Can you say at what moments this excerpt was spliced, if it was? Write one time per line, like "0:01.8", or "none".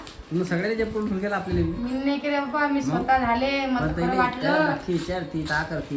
none